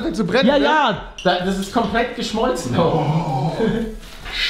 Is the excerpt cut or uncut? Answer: cut